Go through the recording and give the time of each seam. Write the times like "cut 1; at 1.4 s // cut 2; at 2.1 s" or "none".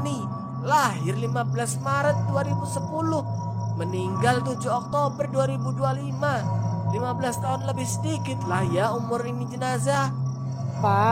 none